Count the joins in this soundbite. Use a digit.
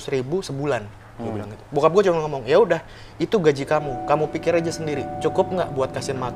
0